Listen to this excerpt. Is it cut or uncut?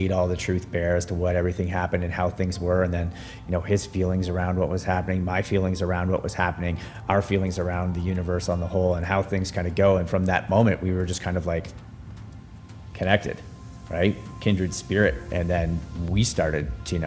uncut